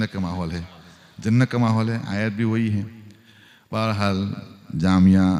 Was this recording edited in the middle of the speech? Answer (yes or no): no